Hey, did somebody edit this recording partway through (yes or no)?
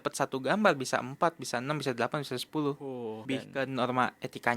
yes